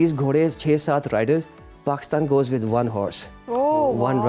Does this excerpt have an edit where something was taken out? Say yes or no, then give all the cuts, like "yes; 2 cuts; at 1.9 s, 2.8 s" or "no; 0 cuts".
no; 0 cuts